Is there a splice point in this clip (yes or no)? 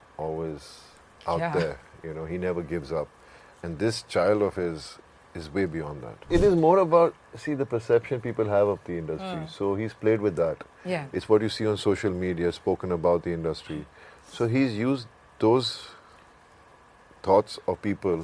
yes